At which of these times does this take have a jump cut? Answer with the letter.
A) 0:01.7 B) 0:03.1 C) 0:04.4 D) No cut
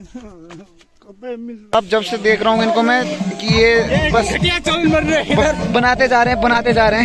A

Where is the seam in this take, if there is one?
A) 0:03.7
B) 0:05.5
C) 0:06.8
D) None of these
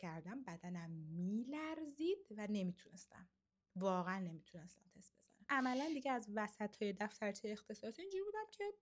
B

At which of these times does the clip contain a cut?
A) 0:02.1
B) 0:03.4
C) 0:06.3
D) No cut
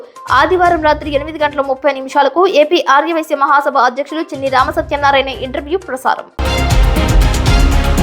C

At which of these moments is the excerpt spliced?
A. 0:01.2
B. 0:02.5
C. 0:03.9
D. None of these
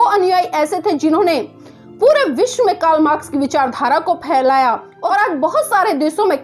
D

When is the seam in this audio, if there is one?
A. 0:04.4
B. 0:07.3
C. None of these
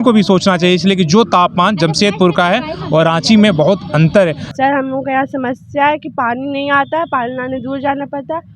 A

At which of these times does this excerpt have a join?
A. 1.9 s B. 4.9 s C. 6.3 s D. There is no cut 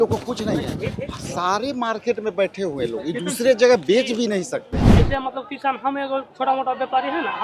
B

